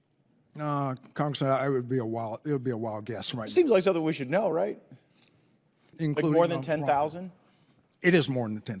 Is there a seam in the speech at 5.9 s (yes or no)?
yes